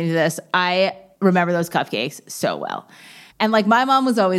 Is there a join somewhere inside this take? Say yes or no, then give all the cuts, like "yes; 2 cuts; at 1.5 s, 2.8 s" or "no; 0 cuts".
no; 0 cuts